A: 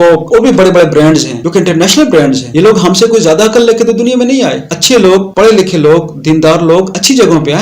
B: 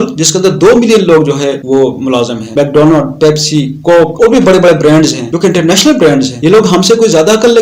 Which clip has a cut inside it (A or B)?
A